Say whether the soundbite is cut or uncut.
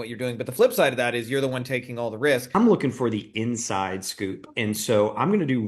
cut